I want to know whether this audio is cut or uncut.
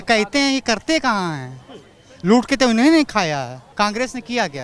cut